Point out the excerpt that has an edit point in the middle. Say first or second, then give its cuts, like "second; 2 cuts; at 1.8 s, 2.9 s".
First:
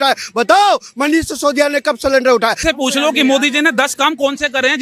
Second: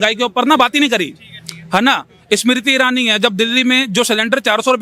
first; 1 cut; at 2.6 s